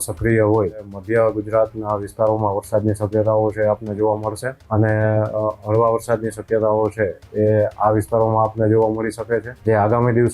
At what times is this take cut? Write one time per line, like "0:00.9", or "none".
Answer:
0:00.9
0:04.5
0:09.5